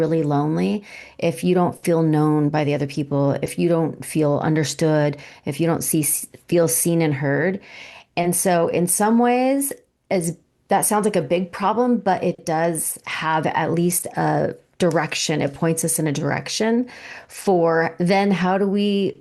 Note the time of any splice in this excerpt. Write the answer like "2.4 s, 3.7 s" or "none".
none

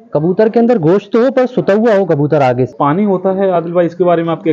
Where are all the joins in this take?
2.7 s

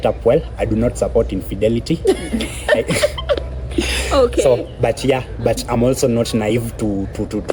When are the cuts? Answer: none

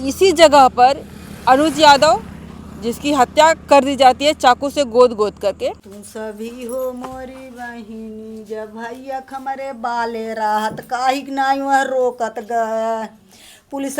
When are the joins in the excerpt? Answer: 5.7 s

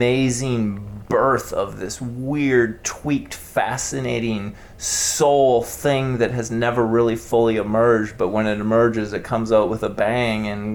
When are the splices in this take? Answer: none

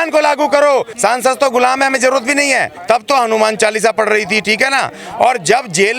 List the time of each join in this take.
0.9 s, 2.7 s

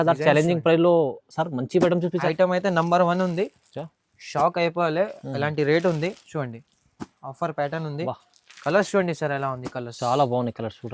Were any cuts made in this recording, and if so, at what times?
2.2 s

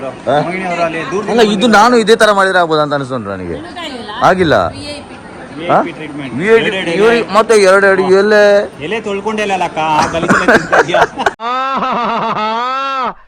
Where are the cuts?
none

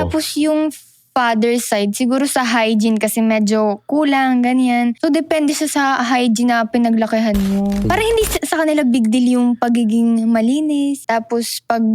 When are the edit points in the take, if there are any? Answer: 5.0 s, 7.9 s, 11.0 s

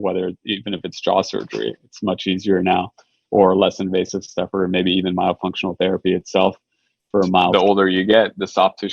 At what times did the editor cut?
7.5 s

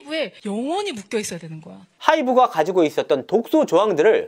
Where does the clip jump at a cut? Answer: 1.9 s

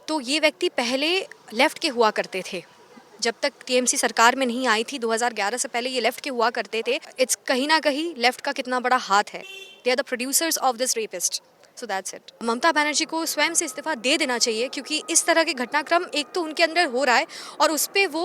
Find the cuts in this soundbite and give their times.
7.1 s, 12.4 s

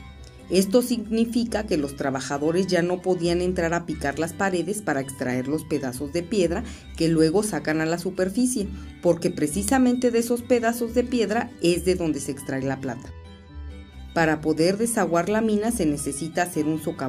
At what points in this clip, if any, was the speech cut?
1.8 s

